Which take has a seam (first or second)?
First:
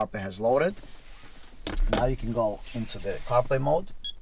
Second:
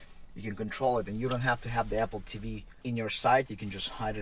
second